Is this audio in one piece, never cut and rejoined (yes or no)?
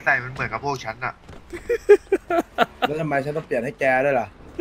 yes